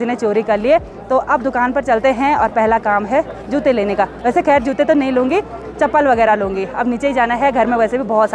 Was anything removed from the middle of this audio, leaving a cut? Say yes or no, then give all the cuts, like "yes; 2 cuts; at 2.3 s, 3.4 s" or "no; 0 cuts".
no; 0 cuts